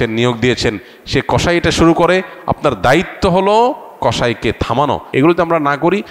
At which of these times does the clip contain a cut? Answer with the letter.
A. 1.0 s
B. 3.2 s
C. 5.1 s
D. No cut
C